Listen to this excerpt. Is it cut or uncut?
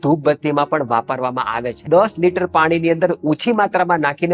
uncut